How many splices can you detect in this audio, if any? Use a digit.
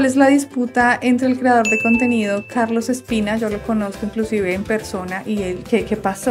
0